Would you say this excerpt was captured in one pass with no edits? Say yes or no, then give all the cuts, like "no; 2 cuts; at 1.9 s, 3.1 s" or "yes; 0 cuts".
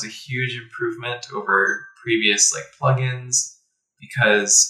yes; 0 cuts